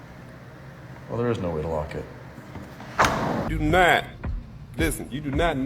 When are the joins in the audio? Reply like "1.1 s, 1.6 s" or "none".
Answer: 3.5 s